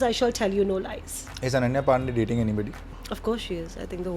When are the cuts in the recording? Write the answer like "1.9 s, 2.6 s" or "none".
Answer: 2.9 s